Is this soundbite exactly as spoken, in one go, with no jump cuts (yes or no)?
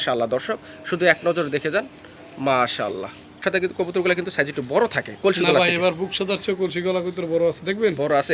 no